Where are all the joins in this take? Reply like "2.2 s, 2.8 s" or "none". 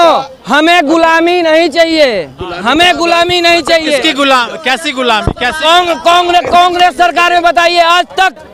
none